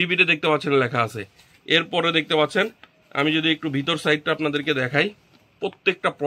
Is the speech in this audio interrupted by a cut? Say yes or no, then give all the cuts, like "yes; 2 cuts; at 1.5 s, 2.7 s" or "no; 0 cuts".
no; 0 cuts